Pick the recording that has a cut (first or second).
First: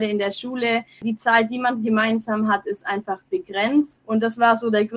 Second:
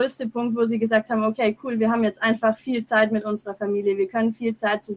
first